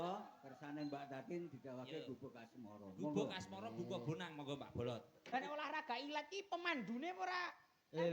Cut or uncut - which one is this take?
cut